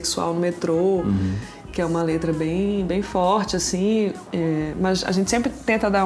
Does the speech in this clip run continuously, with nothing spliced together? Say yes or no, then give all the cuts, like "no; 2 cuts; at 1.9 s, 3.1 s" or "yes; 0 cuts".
yes; 0 cuts